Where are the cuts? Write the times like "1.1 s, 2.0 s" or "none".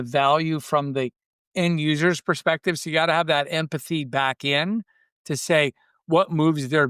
none